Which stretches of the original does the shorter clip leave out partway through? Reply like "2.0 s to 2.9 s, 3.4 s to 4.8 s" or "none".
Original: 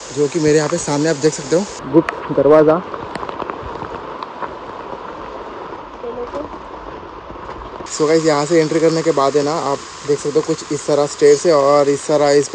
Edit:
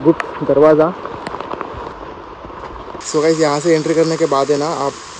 3.8 s to 6.8 s